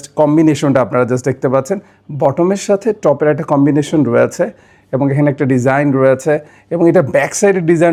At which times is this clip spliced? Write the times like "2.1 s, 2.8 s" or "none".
none